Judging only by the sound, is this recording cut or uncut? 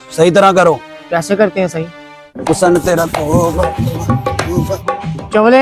cut